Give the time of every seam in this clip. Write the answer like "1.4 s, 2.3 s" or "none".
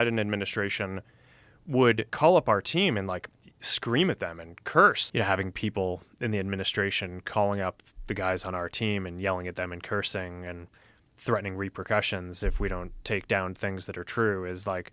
2.1 s, 5.0 s